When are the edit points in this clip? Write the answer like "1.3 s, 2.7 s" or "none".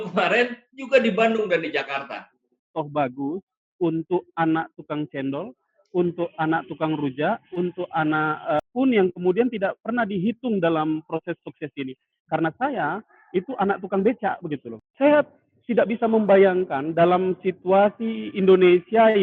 2.7 s, 14.8 s